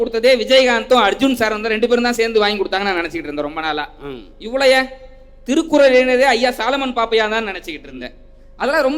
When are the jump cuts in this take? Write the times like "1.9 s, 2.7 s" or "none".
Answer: none

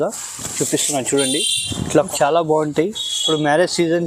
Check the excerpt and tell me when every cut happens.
2.1 s

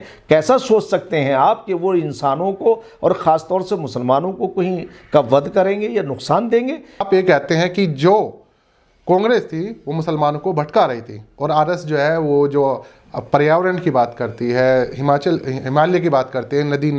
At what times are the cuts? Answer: 7.1 s

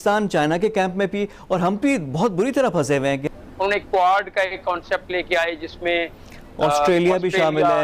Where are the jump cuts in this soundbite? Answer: 3.4 s

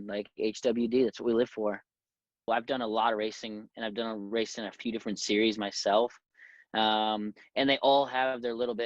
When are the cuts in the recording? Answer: 2.5 s

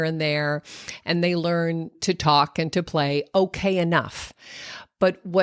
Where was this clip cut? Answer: 2.0 s

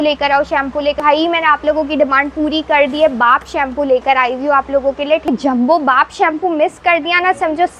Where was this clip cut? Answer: 1.0 s, 5.3 s

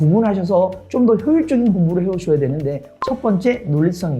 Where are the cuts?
2.9 s

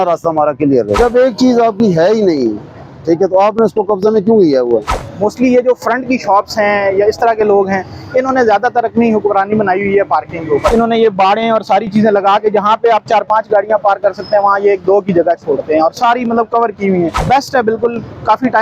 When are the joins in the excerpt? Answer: 1.0 s, 5.0 s, 10.7 s, 17.2 s

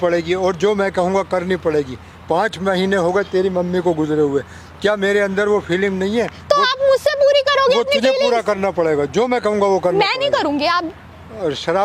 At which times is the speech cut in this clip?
none

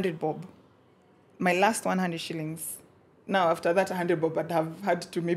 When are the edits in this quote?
none

